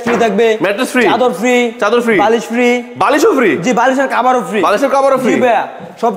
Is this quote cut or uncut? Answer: uncut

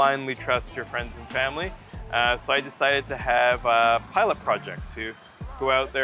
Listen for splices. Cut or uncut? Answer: uncut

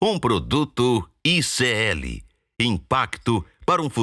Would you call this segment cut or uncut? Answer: uncut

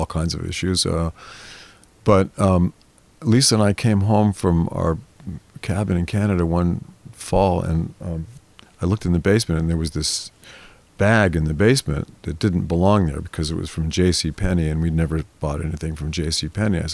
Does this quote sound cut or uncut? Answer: uncut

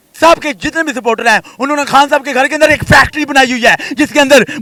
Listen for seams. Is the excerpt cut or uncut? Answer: uncut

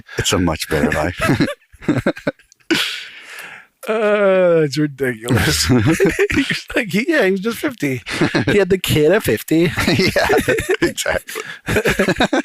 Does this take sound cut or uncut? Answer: uncut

